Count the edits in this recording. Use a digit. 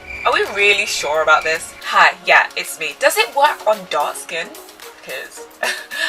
1